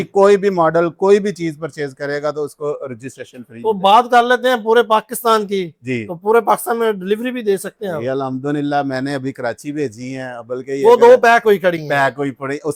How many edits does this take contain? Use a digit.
0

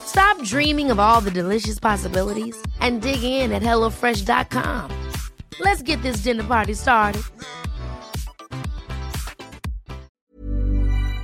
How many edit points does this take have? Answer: 1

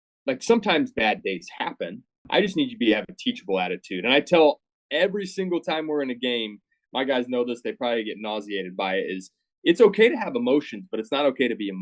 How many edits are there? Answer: 1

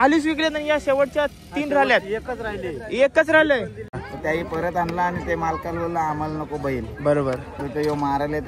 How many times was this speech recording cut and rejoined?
1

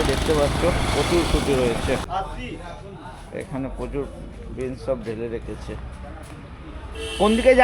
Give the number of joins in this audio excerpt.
1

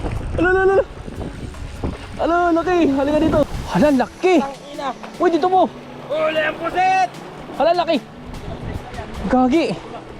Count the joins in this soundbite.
1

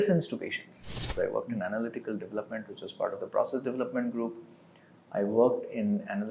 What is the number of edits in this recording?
1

